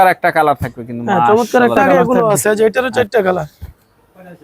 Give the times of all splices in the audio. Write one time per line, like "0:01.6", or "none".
0:01.8